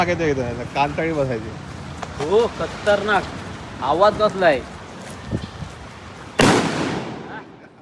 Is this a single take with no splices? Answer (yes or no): yes